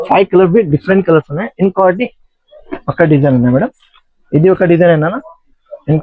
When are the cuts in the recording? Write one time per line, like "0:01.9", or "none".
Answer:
none